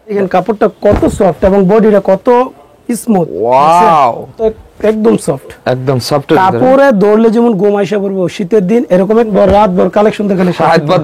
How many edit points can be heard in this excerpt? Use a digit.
2